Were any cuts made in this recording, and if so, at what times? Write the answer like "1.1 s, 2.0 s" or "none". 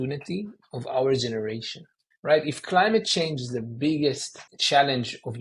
4.5 s